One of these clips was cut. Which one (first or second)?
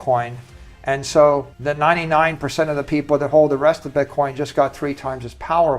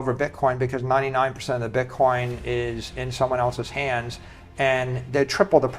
first